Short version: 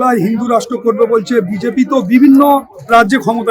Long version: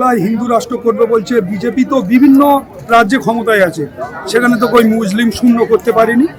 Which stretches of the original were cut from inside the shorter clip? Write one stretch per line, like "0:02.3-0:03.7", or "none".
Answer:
none